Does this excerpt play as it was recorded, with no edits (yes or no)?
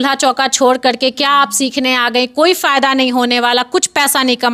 yes